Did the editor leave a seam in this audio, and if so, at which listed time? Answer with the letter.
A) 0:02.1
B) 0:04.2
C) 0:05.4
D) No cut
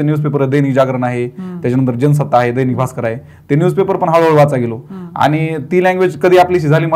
D